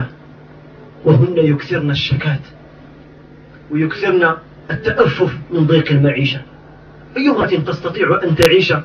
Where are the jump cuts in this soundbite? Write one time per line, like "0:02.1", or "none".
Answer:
0:07.4